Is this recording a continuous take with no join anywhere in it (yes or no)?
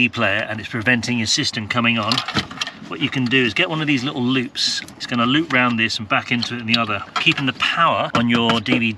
no